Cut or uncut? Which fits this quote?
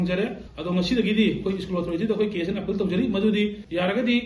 uncut